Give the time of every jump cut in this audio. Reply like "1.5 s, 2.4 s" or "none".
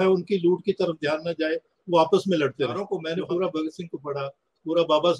2.8 s